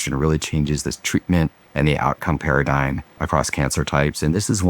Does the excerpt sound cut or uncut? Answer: cut